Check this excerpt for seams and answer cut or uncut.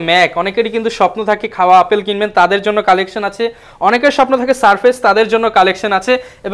uncut